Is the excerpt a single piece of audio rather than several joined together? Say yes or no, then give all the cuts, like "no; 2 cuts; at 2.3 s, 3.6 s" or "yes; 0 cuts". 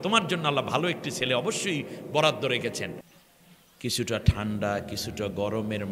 no; 1 cut; at 3.1 s